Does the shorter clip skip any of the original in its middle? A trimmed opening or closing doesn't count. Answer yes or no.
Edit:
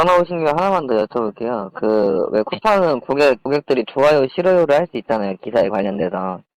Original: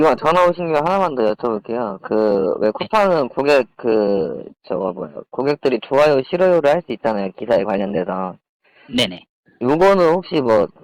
yes